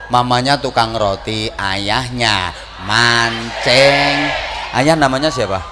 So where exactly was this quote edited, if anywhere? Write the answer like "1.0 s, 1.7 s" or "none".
none